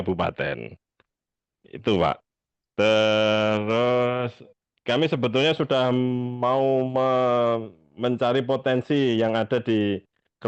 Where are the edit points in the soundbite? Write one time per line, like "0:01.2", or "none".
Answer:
none